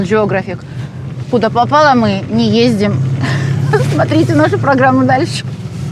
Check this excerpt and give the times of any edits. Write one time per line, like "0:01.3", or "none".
none